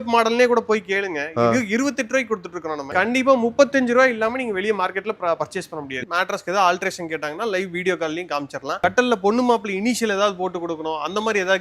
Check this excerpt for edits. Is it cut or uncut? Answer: cut